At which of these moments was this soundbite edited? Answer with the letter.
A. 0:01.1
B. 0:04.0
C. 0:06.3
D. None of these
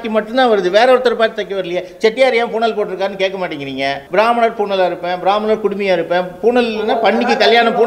B